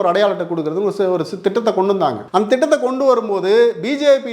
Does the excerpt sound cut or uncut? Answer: cut